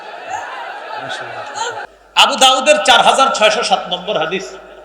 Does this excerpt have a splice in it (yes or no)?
yes